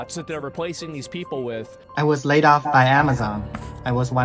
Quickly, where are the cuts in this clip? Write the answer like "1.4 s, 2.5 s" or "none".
1.8 s